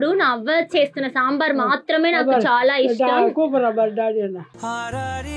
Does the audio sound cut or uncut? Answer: uncut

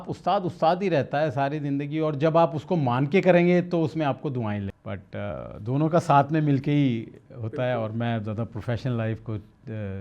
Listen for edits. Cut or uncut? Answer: cut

